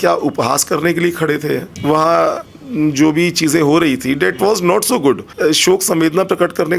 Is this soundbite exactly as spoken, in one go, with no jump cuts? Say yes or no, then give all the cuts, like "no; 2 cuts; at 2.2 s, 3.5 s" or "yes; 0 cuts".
no; 2 cuts; at 1.7 s, 5.3 s